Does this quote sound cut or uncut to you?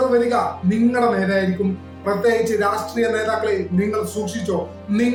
uncut